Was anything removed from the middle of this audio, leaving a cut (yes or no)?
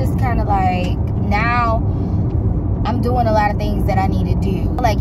no